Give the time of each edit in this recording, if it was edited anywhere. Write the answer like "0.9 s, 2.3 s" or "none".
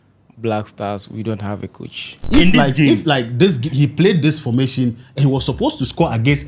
2.2 s